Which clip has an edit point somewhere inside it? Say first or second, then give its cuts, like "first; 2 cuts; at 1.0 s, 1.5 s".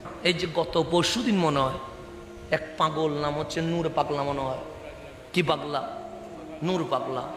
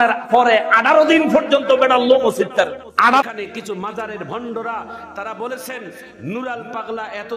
second; 1 cut; at 3.2 s